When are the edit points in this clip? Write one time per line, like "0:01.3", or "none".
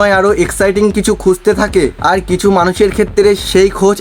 none